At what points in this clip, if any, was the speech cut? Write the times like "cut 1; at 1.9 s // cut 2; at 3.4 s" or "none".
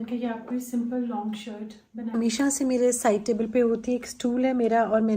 cut 1; at 2.1 s

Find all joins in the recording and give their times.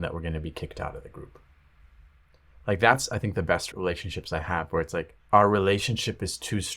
cut 1; at 3.7 s // cut 2; at 5.2 s

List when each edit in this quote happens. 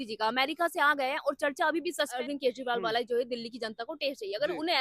cut 1; at 2.1 s

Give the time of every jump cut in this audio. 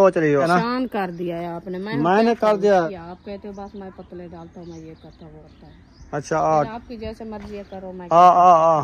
cut 1; at 0.8 s // cut 2; at 2.9 s // cut 3; at 5.5 s

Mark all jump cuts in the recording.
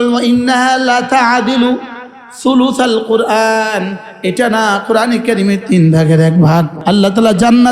cut 1; at 6.7 s

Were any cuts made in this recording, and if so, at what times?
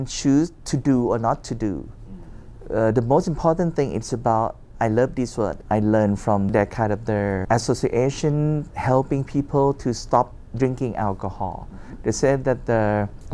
none

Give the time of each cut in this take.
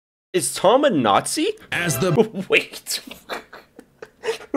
none

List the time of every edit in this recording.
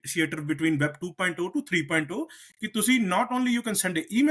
none

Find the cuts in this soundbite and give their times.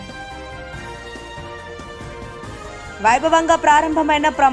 cut 1; at 2.9 s

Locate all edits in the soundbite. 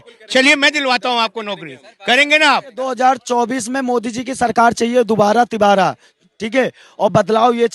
cut 1; at 2.9 s

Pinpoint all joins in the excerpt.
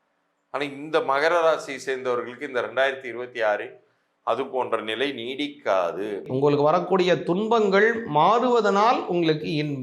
cut 1; at 6.2 s

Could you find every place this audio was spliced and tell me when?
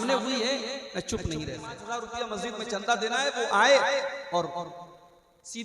cut 1; at 1.8 s

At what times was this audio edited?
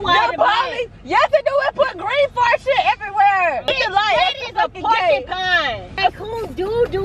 cut 1; at 3.7 s // cut 2; at 5.9 s

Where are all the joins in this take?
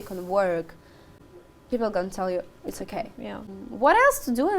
cut 1; at 1.2 s // cut 2; at 3.6 s

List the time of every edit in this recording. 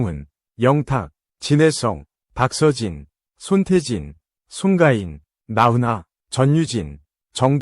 cut 1; at 6.2 s

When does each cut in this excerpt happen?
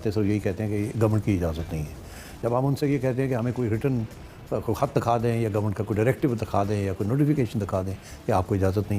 none

